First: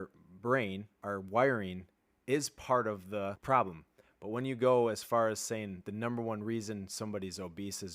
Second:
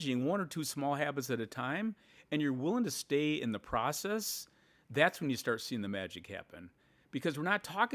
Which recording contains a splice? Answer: first; 2 cuts; at 0.9 s, 3.4 s

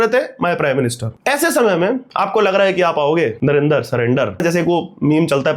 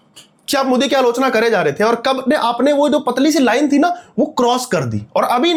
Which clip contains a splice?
first; 4 cuts; at 1.1 s, 2.1 s, 3.4 s, 4.4 s

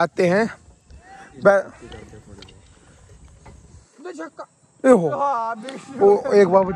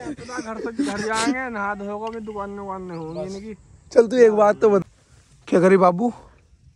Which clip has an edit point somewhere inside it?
second; 1 cut; at 4.8 s

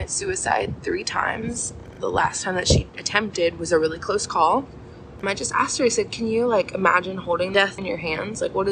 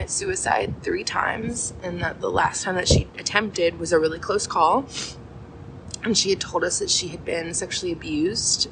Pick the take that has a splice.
first; 3 cuts; at 1.9 s, 5.2 s, 7.6 s

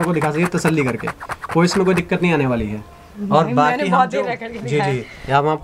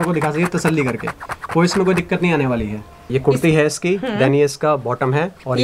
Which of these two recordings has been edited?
second; 1 cut; at 3.0 s

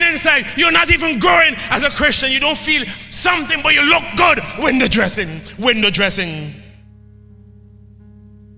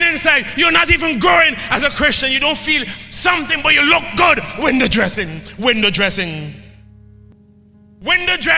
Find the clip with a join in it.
second; 1 cut; at 7.3 s

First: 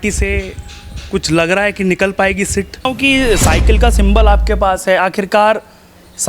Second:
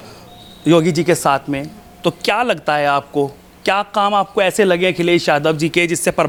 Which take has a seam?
first; 1 cut; at 2.9 s

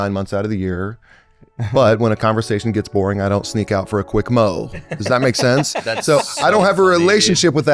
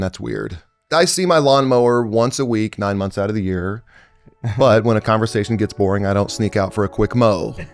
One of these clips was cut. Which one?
second; 1 cut; at 0.9 s

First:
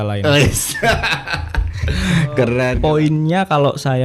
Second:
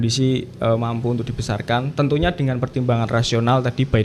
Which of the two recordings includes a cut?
first; 1 cut; at 2.8 s

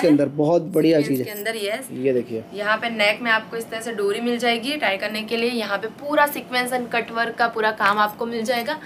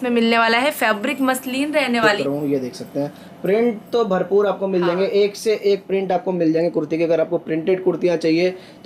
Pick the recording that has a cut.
second; 1 cut; at 2.2 s

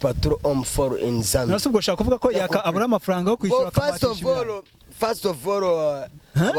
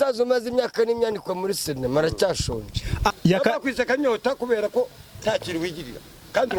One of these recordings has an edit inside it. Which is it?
second; 1 cut; at 3.1 s

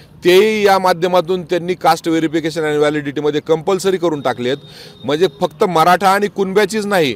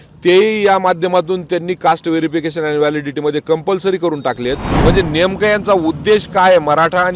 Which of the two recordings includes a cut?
second; 1 cut; at 4.7 s

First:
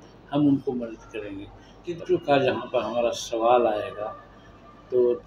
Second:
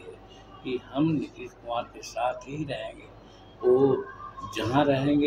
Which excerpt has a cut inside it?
first; 1 cut; at 2.0 s

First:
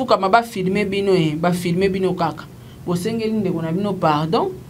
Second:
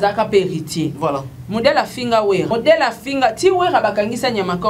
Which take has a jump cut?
second; 2 cuts; at 0.9 s, 2.5 s

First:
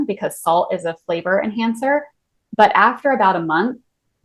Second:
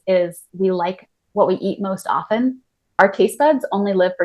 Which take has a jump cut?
second; 1 cut; at 3.0 s

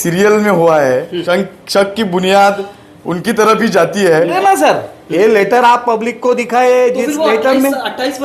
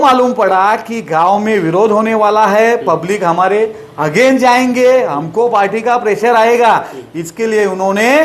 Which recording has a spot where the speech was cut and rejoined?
first; 2 cuts; at 1.1 s, 4.4 s

